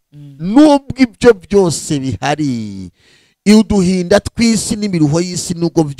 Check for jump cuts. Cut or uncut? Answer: uncut